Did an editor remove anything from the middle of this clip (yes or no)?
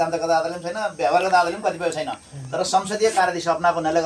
no